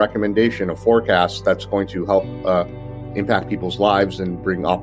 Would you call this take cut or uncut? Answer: uncut